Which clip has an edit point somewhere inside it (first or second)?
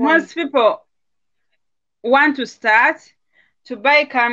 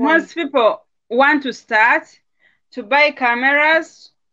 second